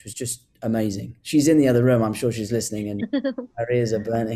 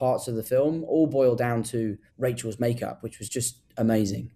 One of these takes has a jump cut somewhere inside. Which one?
second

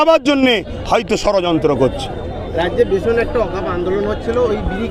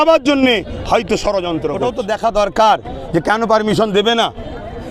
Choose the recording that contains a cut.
second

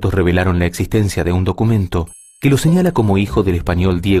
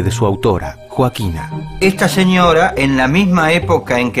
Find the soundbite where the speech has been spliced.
second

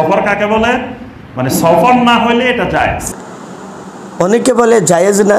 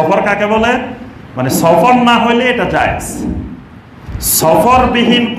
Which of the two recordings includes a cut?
first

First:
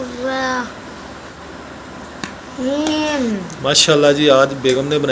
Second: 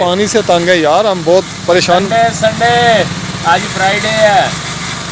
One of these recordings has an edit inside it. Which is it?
first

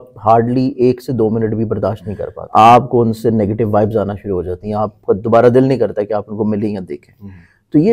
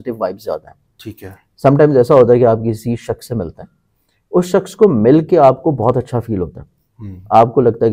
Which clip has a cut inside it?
first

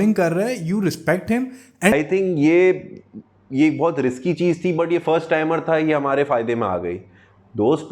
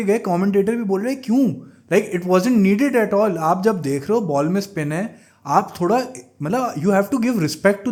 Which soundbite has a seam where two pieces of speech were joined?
first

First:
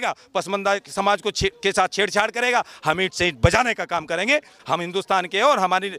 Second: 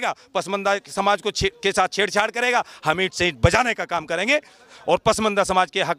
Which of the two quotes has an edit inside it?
first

